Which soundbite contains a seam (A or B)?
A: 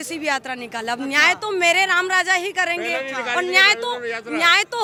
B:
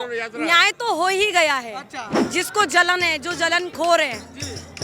B